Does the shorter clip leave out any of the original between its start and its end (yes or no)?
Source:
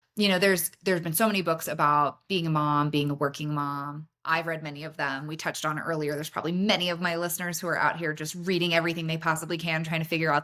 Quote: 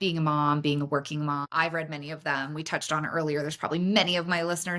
yes